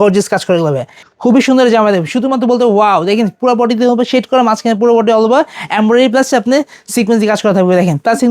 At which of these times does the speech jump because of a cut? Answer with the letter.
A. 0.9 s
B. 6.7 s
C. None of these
A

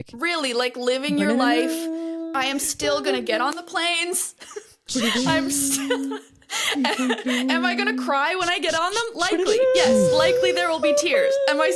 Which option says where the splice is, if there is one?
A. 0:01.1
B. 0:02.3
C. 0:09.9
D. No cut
B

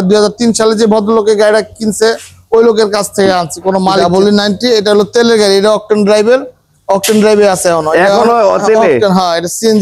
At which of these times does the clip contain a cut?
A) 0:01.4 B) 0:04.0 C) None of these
B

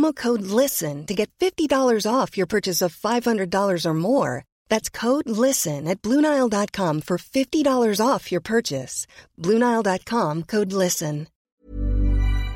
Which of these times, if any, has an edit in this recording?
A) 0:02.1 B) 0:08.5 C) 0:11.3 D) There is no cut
C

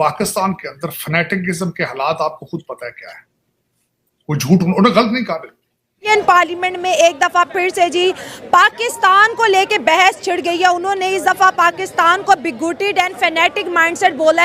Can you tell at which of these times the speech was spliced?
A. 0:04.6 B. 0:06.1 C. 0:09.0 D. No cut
B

